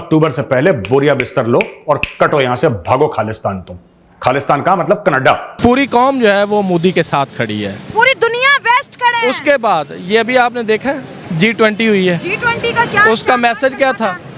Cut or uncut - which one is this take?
cut